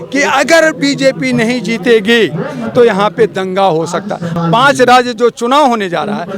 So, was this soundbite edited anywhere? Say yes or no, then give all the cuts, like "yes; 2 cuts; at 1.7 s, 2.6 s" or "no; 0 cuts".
yes; 1 cut; at 4.3 s